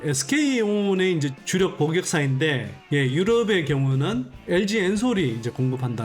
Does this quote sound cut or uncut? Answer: uncut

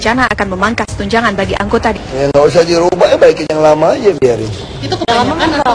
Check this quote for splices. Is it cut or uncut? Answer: uncut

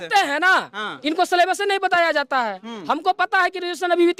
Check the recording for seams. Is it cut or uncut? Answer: uncut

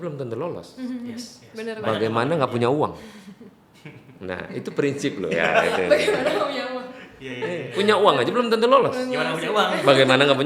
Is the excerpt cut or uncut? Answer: uncut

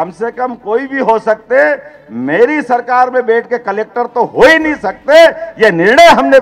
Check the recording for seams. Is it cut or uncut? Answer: uncut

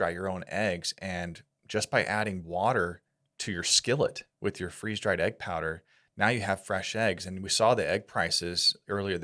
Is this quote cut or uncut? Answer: uncut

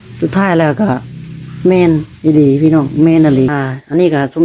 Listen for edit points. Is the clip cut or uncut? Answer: cut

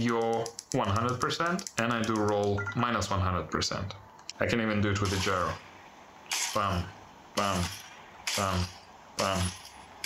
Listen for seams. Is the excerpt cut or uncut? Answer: cut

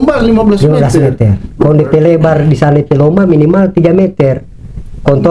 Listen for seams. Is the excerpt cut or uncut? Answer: uncut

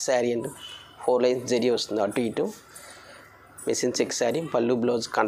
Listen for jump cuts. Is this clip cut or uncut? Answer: uncut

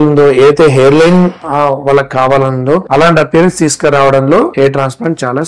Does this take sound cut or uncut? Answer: cut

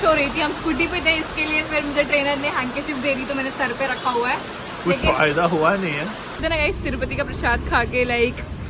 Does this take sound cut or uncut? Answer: cut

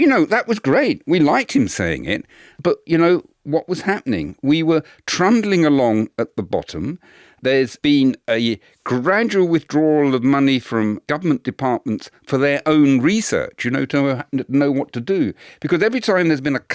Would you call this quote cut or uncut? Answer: uncut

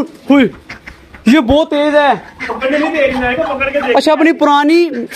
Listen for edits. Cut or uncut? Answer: uncut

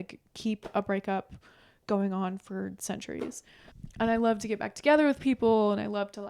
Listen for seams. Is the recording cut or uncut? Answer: uncut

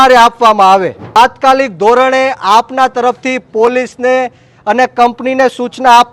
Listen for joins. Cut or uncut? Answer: cut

